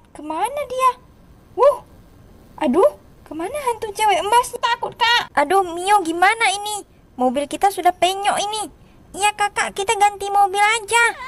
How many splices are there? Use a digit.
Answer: 1